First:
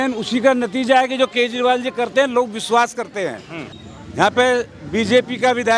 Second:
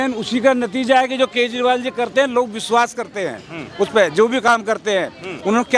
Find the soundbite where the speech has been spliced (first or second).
first